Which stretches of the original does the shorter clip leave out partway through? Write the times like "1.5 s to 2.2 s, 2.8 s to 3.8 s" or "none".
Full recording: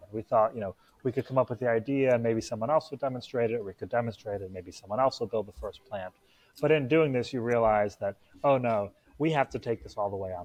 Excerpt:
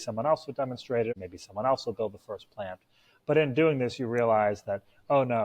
3.6 s to 4.5 s